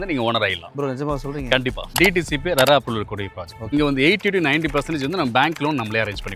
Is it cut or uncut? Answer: cut